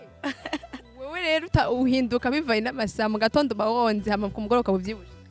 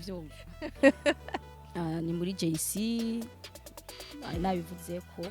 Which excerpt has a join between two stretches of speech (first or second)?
second